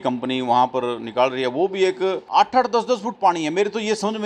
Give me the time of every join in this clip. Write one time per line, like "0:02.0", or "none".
0:02.2